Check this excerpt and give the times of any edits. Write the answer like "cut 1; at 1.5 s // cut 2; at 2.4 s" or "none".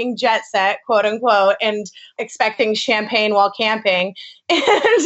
cut 1; at 2.1 s